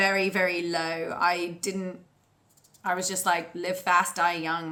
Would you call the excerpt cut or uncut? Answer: uncut